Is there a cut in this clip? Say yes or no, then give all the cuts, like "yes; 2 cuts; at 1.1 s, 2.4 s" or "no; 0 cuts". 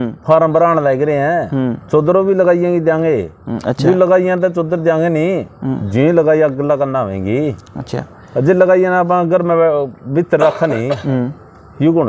no; 0 cuts